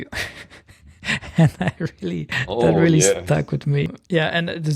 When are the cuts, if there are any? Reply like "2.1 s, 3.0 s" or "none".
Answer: 2.3 s, 3.9 s